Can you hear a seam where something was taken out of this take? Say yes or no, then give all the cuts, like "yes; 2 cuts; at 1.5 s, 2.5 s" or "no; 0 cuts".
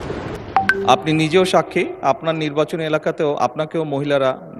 no; 0 cuts